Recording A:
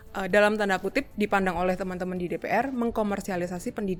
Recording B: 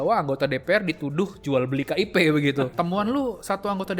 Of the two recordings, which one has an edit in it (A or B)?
B